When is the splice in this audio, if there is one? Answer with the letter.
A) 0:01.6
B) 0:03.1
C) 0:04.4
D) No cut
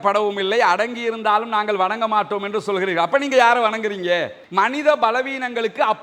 C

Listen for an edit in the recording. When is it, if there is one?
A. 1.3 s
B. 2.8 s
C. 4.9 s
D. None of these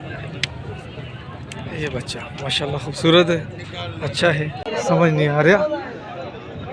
C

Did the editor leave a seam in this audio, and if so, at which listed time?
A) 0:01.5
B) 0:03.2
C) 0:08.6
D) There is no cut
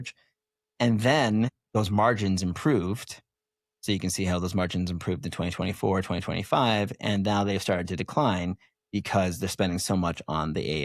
A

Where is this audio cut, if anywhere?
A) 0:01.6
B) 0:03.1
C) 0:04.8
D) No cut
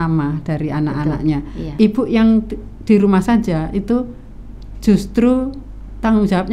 A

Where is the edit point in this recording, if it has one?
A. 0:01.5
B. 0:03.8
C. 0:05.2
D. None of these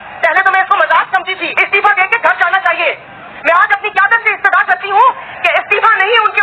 A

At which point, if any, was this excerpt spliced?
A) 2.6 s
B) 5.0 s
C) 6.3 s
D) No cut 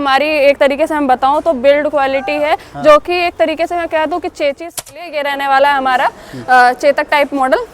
B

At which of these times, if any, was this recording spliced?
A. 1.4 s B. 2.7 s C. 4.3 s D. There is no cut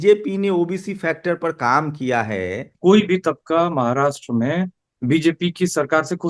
B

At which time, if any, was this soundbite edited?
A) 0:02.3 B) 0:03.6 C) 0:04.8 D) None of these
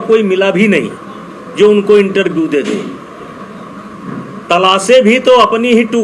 D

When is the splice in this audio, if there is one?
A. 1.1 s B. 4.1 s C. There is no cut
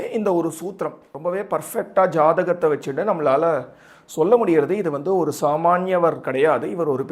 A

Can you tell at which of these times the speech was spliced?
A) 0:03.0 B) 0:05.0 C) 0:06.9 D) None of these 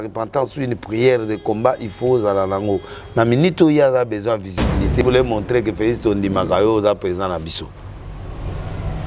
B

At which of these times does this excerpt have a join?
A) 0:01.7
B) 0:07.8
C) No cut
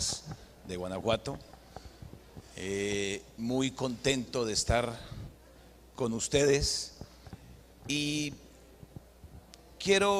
A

